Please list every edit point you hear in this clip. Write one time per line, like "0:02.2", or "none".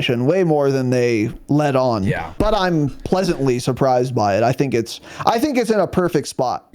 0:02.3

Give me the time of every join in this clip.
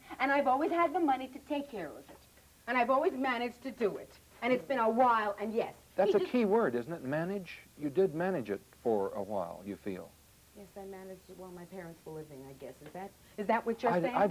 none

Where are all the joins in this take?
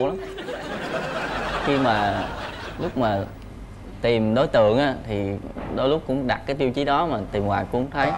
none

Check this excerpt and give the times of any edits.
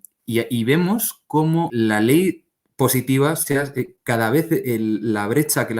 0:01.7

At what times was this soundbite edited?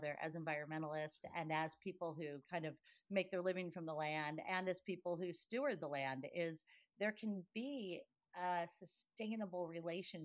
none

